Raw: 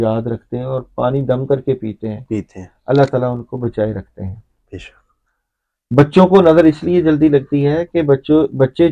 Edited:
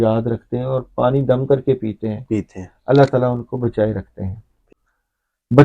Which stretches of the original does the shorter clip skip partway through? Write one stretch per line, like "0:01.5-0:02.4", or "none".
0:04.6-0:05.0